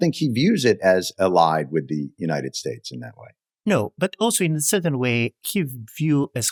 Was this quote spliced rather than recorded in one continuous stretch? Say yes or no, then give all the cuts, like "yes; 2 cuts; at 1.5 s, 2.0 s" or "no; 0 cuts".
no; 0 cuts